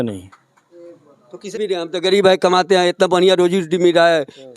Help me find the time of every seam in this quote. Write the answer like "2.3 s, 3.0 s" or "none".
1.5 s